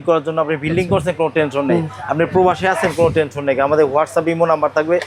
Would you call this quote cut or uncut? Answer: uncut